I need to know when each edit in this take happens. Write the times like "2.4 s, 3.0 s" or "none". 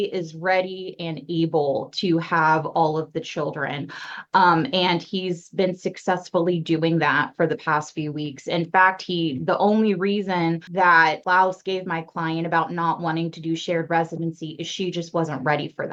none